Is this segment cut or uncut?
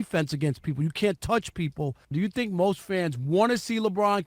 cut